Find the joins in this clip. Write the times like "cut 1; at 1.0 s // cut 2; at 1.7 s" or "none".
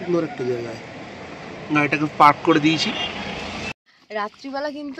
cut 1; at 4.0 s